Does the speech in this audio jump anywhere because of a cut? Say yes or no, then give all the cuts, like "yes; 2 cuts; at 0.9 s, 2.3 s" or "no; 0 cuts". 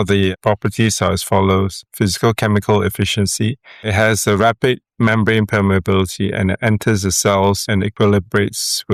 no; 0 cuts